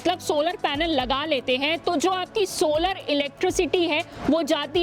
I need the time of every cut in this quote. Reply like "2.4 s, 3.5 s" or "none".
none